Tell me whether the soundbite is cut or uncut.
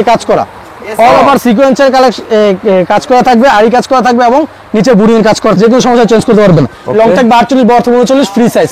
cut